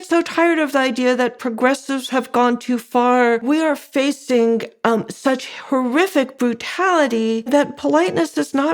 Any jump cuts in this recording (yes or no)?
yes